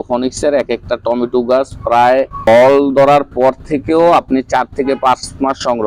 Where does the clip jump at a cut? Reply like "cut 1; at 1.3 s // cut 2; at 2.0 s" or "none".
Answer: cut 1; at 2.4 s

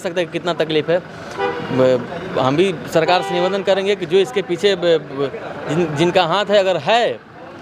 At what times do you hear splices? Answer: none

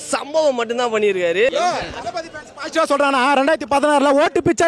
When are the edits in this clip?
cut 1; at 1.5 s

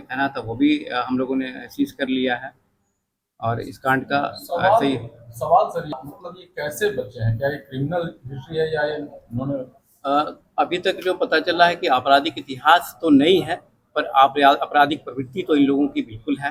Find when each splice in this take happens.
none

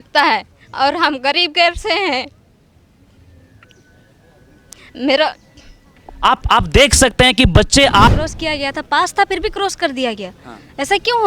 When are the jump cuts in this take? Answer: cut 1; at 8.1 s

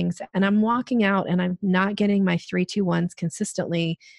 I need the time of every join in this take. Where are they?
none

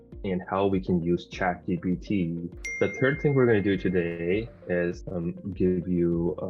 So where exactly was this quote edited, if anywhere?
cut 1; at 2.6 s // cut 2; at 5.0 s

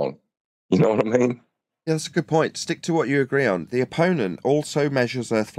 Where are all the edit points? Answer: none

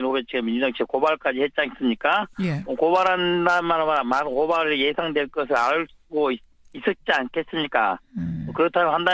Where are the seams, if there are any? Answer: cut 1; at 1.7 s

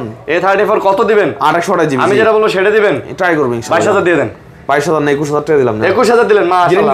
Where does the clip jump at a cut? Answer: none

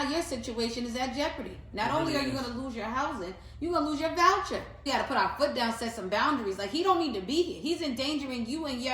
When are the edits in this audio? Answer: cut 1; at 4.8 s

